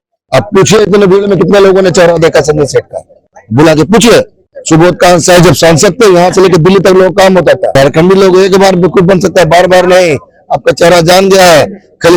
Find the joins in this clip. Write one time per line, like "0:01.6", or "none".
0:07.7